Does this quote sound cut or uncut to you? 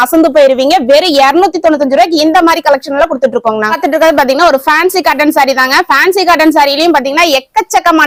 uncut